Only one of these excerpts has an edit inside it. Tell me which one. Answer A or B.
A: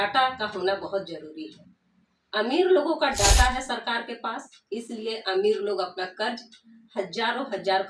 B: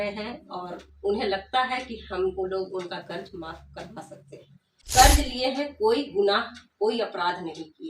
B